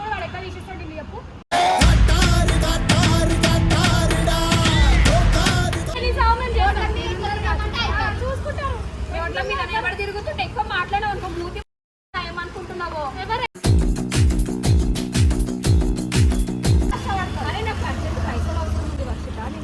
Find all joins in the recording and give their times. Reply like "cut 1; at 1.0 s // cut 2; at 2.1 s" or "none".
cut 1; at 6.0 s // cut 2; at 16.9 s